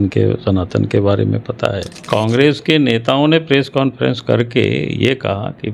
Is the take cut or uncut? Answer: cut